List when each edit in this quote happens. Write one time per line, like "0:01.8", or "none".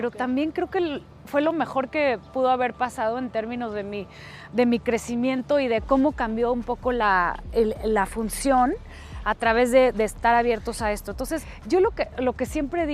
0:11.5